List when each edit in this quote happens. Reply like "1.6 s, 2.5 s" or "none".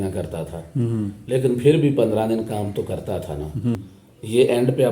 3.8 s

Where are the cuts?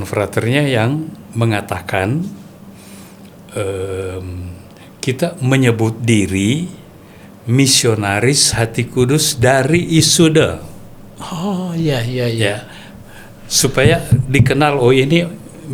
none

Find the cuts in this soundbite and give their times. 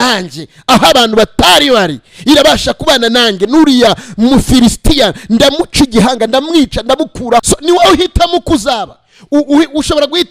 7.4 s

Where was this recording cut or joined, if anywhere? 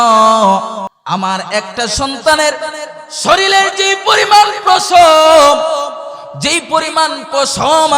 0.9 s

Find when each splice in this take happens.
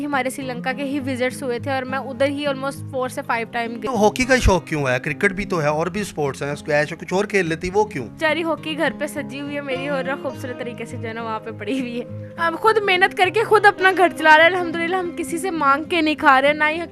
3.8 s, 8.1 s, 12.2 s

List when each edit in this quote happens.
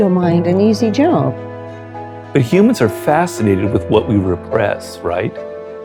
1.9 s

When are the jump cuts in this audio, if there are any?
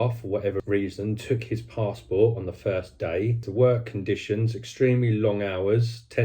3.5 s

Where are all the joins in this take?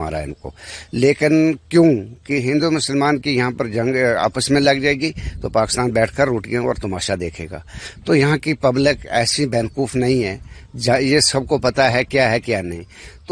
none

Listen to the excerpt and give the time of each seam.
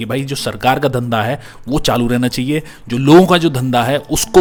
none

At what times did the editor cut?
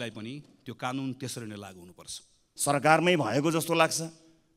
2.4 s

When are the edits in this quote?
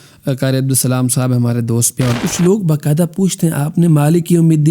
2.2 s

